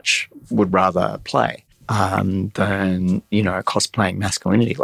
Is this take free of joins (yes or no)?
no